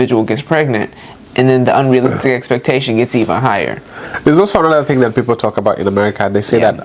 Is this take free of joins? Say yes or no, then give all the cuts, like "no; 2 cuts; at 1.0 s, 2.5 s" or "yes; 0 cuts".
no; 1 cut; at 4.1 s